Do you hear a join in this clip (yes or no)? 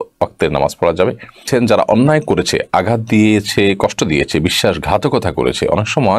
yes